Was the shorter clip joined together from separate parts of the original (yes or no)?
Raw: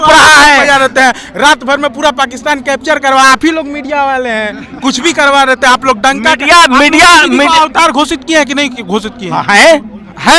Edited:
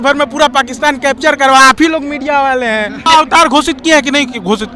yes